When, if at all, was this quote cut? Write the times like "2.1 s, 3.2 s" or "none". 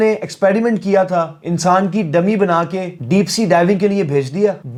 none